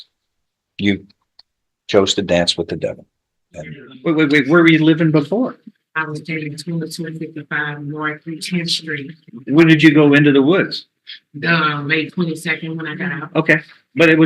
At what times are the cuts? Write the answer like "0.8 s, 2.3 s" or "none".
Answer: 3.8 s